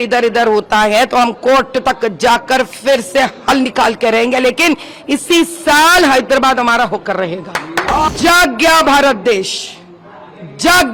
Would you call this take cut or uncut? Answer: cut